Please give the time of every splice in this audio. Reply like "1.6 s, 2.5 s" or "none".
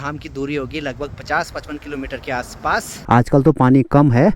3.0 s